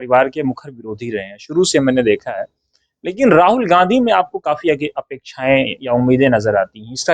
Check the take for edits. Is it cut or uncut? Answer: uncut